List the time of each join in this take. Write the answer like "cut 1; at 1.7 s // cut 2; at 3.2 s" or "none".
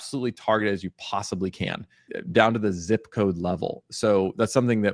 cut 1; at 2.1 s